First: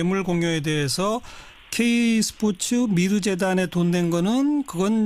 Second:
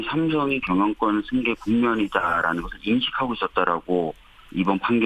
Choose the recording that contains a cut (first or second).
first